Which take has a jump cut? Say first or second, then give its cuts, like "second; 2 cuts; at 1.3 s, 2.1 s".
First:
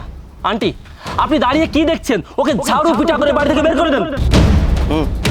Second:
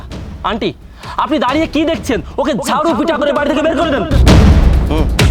first; 1 cut; at 4.1 s